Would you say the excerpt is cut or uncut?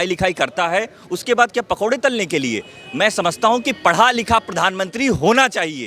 uncut